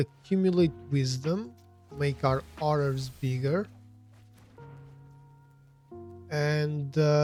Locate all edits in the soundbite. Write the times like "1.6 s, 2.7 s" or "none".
none